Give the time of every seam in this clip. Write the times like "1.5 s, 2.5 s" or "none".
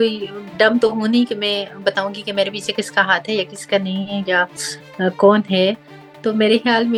none